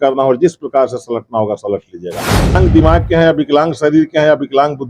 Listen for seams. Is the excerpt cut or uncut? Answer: cut